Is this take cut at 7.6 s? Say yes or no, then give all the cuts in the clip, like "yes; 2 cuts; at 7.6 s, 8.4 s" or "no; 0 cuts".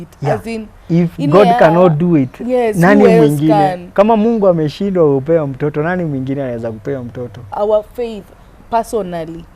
yes; 1 cut; at 7.6 s